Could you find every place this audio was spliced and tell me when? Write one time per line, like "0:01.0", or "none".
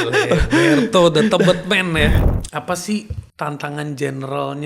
0:02.2
0:03.2